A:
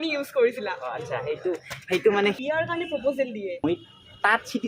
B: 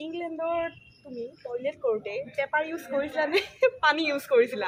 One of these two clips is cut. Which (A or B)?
A